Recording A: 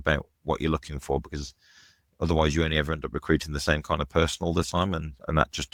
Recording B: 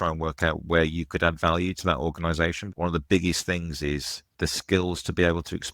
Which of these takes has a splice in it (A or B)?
B